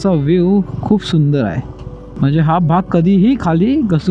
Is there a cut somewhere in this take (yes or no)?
no